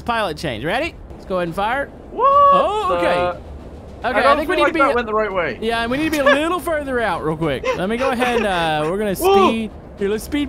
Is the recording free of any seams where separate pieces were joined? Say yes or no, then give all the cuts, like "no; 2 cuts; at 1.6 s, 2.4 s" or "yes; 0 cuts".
no; 2 cuts; at 1.1 s, 2.0 s